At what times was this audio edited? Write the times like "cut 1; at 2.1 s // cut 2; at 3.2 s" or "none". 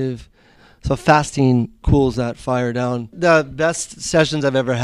cut 1; at 1.8 s // cut 2; at 3.1 s